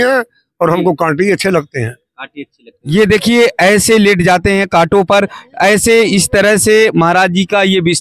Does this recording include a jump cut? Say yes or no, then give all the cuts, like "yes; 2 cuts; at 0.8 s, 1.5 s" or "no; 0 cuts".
yes; 1 cut; at 2.7 s